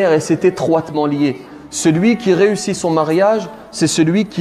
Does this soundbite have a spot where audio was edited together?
no; 0 cuts

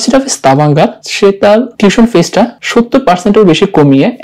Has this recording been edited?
yes; 2 cuts; at 1.4 s, 2.6 s

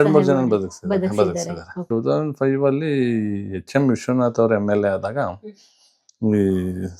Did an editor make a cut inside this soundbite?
yes; 1 cut; at 1.9 s

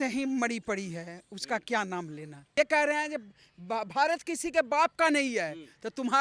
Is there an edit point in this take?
yes; 1 cut; at 2.4 s

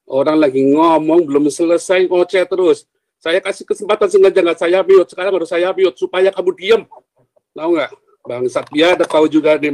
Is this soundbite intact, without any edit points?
yes; 0 cuts

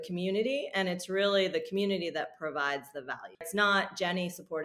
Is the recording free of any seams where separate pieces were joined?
no; 1 cut; at 3.5 s

